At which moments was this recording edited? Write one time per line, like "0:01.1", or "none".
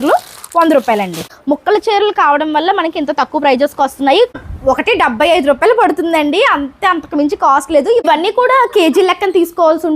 0:01.3
0:04.5
0:08.0